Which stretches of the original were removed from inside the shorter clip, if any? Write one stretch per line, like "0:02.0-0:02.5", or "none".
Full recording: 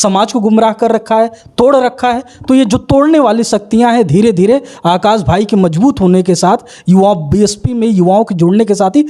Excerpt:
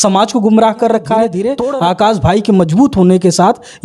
0:01.5-0:04.5